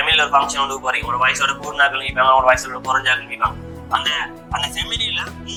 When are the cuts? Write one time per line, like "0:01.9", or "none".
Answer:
none

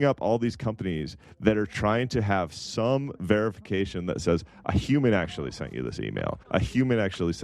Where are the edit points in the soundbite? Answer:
0:01.7
0:06.4

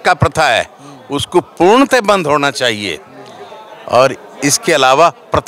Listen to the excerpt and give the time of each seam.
none

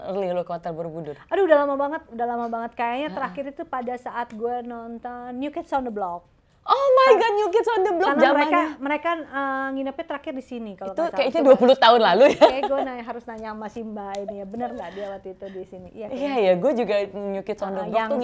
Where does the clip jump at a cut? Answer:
none

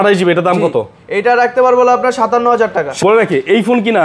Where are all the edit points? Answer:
0:02.9

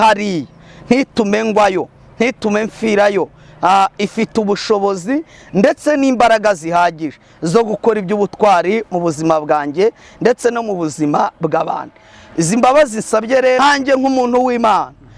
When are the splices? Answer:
0:13.6

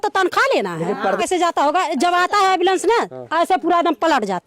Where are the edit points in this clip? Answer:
0:01.2

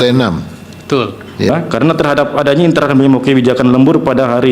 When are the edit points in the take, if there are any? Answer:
0:01.5

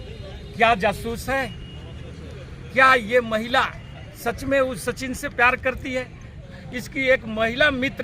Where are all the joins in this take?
0:06.4

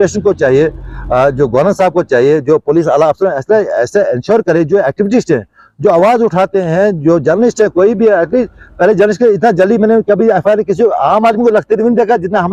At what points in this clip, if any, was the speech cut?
none

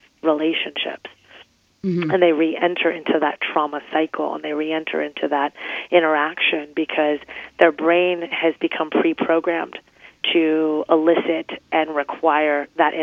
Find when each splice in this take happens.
none

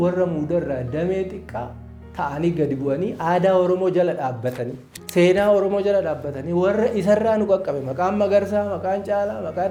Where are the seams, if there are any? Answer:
none

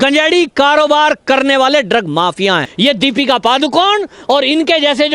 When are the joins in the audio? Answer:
0:02.7

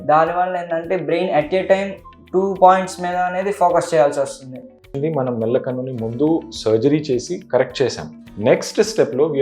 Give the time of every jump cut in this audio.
0:04.9

